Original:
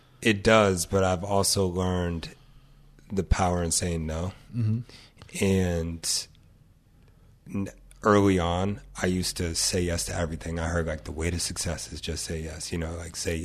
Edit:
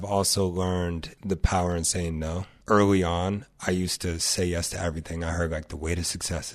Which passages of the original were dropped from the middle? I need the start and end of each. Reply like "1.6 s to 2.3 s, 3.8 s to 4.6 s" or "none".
2.3 s to 3.0 s, 4.4 s to 7.9 s